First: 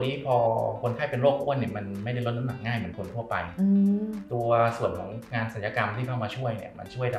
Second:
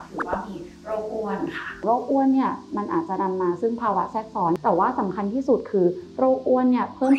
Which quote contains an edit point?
second; 2 cuts; at 1.7 s, 4.6 s

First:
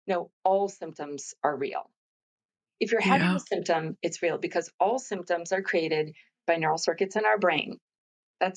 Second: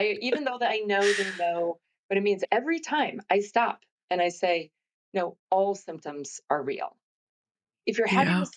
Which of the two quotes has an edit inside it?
second; 1 cut; at 2.4 s

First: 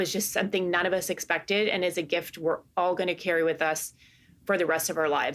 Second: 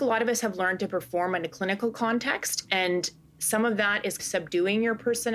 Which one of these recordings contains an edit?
second; 1 cut; at 4.2 s

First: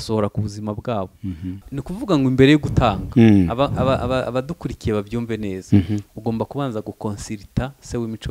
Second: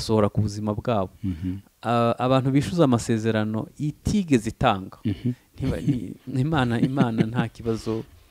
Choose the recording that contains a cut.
first; 1 cut; at 1.7 s

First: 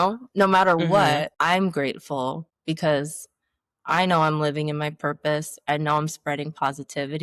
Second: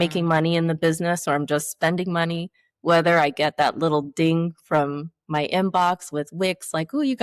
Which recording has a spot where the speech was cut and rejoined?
first; 2 cuts; at 1.3 s, 2.5 s

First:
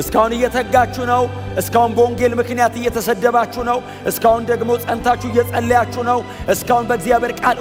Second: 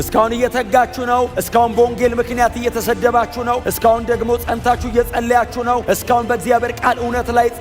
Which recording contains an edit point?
second; 3 cuts; at 1.4 s, 3.7 s, 5.8 s

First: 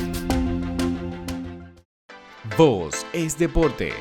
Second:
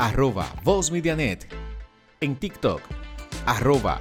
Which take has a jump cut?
first; 1 cut; at 1.9 s

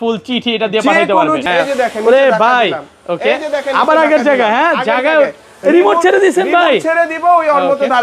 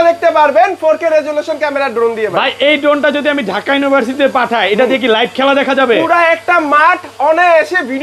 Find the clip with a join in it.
first; 1 cut; at 1.4 s

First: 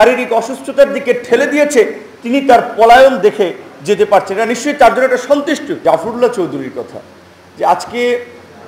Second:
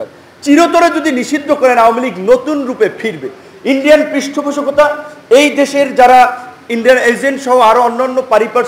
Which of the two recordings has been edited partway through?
first; 1 cut; at 5.7 s

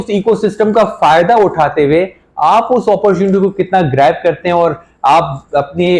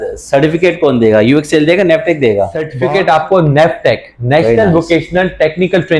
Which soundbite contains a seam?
second; 1 cut; at 2.7 s

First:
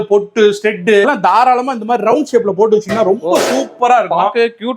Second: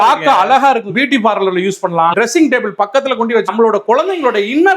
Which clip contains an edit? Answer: second; 2 cuts; at 0.9 s, 3.5 s

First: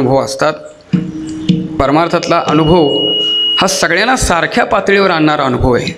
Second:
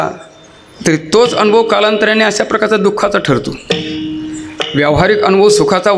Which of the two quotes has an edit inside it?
first; 1 cut; at 1.8 s

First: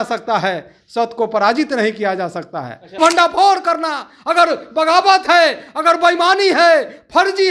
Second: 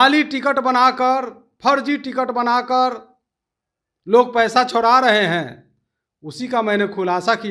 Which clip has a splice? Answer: first; 1 cut; at 3.0 s

